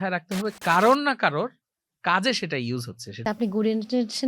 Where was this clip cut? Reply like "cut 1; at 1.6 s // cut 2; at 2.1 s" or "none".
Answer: cut 1; at 3.2 s

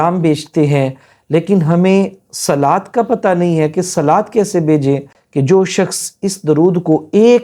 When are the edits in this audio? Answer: cut 1; at 5.2 s

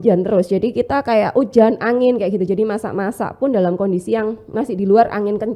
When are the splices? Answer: none

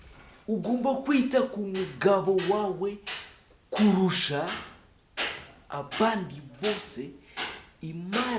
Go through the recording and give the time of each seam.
none

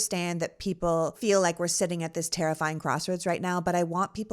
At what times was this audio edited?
cut 1; at 1.2 s

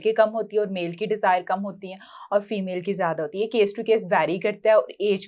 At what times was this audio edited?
none

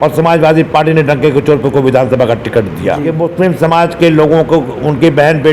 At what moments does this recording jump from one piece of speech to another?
cut 1; at 3.1 s

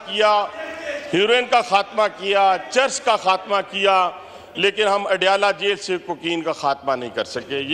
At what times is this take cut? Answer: none

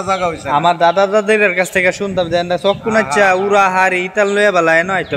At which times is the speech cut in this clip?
none

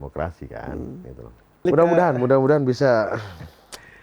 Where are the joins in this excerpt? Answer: cut 1; at 1.7 s

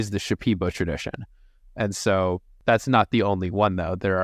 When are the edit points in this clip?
cut 1; at 2.5 s

